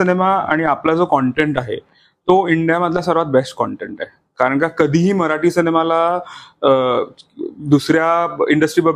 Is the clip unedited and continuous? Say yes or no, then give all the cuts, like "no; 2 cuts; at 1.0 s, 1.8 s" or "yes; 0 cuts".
yes; 0 cuts